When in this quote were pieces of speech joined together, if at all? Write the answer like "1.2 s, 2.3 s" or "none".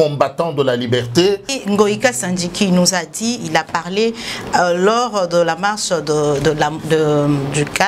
1.6 s